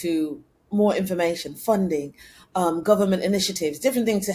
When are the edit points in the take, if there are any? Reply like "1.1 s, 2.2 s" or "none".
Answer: none